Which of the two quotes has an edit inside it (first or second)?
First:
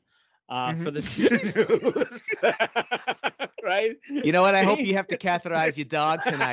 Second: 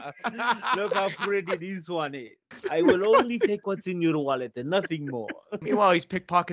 second